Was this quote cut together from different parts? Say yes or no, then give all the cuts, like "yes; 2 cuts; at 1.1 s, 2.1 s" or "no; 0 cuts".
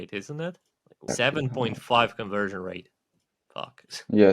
yes; 1 cut; at 1.1 s